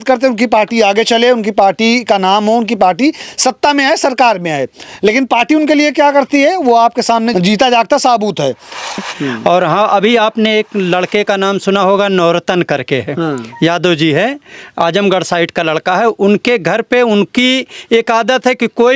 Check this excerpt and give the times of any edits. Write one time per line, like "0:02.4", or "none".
0:07.3
0:09.1